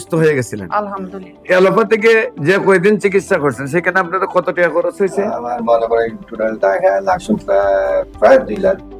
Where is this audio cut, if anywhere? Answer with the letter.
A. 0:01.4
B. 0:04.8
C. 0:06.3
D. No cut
A